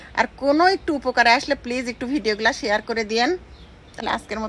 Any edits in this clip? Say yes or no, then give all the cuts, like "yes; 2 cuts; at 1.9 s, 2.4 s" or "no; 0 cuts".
no; 0 cuts